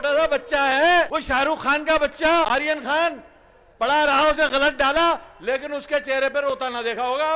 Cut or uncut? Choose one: cut